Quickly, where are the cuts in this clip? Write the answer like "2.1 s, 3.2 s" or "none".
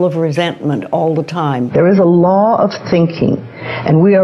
1.7 s